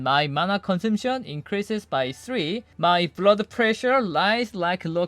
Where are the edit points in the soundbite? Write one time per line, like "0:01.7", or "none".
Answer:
0:02.7